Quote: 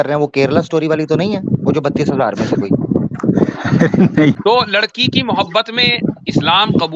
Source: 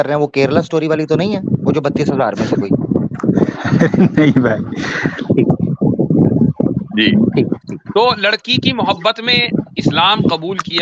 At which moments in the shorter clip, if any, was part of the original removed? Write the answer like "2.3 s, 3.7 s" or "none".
4.3 s